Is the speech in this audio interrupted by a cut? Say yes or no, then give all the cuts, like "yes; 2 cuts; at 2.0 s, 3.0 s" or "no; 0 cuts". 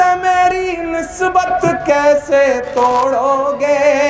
no; 0 cuts